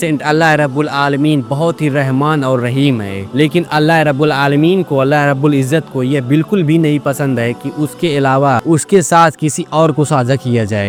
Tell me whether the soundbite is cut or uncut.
uncut